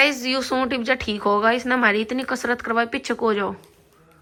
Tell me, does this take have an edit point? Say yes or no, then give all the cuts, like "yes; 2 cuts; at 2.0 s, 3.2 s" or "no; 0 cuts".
no; 0 cuts